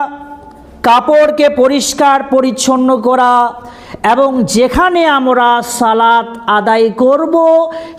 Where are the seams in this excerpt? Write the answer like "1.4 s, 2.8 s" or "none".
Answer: none